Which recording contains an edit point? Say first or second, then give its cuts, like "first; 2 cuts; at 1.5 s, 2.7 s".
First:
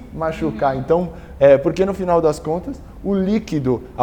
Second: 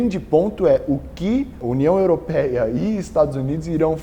second; 1 cut; at 1.7 s